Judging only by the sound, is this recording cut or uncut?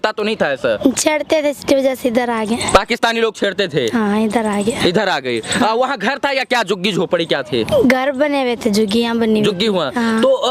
uncut